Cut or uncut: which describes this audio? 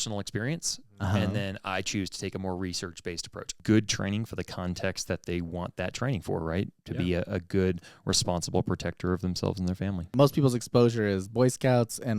cut